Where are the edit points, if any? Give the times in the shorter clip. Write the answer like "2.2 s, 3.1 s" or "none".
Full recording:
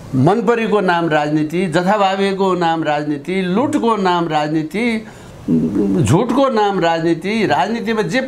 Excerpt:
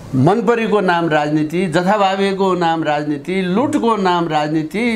none

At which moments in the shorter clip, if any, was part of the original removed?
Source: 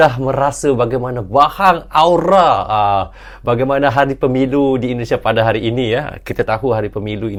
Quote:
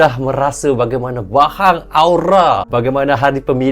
2.6 s

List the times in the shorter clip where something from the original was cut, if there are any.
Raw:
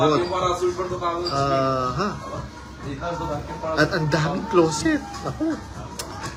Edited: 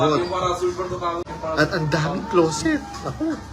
1.2 s

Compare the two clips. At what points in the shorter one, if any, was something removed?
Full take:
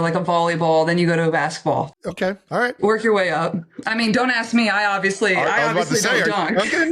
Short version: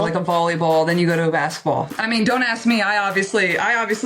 1.9 s

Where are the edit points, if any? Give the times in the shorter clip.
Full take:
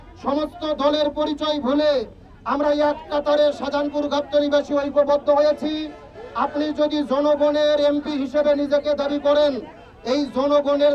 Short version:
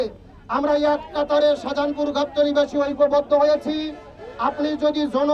none

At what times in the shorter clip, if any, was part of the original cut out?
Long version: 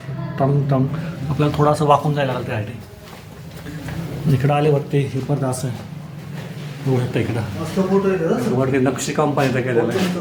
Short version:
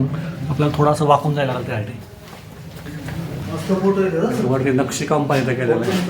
3.4 s

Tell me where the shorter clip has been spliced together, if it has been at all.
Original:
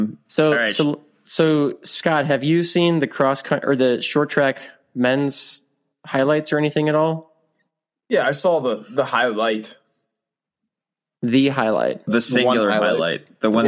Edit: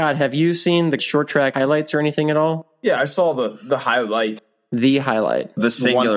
1.0 s, 2.7 s, 4.5 s

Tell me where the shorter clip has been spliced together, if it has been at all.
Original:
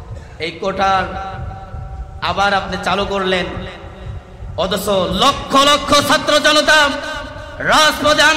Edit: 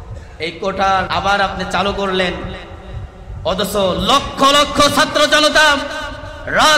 1.1 s

